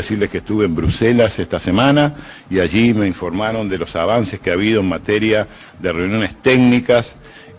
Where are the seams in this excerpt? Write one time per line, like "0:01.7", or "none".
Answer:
0:01.6